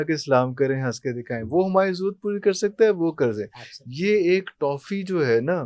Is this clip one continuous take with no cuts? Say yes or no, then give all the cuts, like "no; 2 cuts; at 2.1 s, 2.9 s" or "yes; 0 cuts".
yes; 0 cuts